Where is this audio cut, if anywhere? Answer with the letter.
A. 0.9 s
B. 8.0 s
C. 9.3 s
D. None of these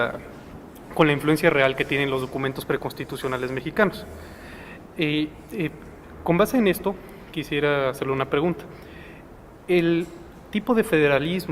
A